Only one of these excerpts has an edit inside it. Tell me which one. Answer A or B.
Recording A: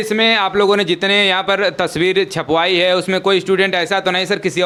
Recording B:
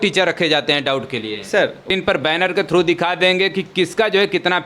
B